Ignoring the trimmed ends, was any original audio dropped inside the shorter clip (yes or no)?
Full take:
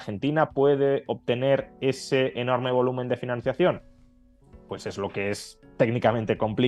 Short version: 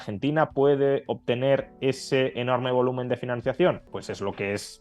yes